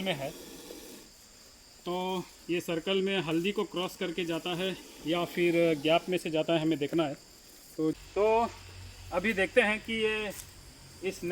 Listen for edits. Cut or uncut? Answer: cut